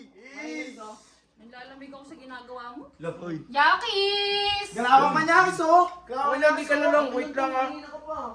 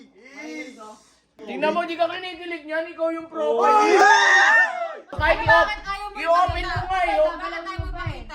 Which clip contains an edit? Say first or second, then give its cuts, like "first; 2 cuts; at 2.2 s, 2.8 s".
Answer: second; 2 cuts; at 1.4 s, 5.1 s